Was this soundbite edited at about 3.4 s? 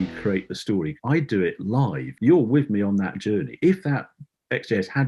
no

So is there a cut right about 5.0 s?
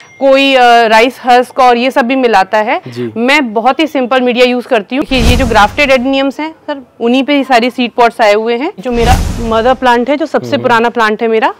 yes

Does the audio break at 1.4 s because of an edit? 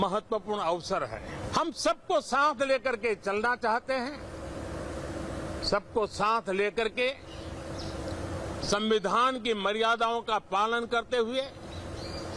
yes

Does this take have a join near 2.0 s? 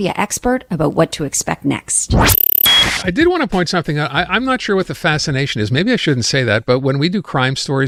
no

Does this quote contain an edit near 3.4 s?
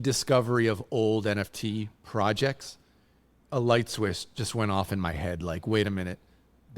yes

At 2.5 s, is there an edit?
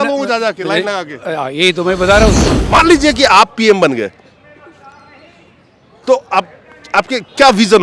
yes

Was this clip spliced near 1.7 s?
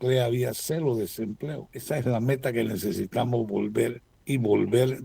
yes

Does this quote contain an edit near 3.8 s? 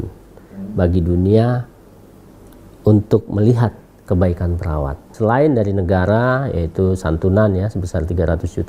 no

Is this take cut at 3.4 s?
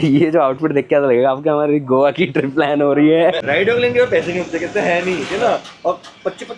yes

